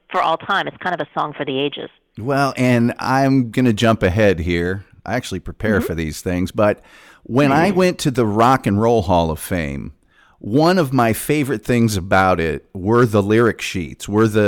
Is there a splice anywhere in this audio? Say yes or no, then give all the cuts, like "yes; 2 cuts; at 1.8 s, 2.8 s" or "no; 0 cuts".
no; 0 cuts